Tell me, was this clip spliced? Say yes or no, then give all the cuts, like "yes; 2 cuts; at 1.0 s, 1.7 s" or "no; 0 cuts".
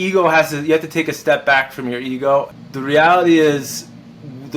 yes; 1 cut; at 2.5 s